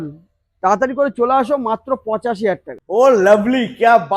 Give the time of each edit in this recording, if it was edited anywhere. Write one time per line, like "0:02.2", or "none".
0:02.7

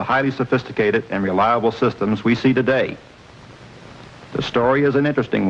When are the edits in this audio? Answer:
none

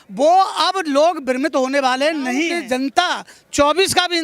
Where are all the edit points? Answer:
0:02.6

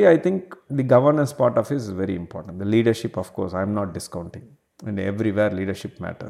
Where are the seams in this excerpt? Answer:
none

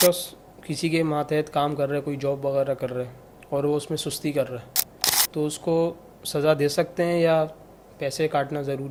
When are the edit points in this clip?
none

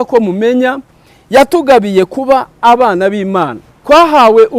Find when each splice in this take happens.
0:03.7

